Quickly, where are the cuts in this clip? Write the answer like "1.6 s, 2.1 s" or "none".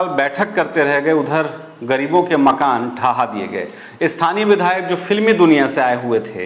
none